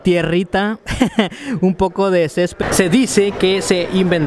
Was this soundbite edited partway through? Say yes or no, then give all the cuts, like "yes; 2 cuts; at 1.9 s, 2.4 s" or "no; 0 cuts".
yes; 1 cut; at 2.6 s